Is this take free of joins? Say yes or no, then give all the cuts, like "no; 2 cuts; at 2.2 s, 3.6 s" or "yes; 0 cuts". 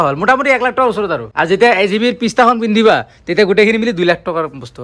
no; 1 cut; at 1.2 s